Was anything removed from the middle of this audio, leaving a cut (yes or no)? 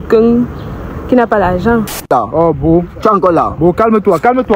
yes